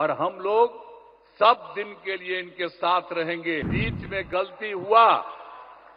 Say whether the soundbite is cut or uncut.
cut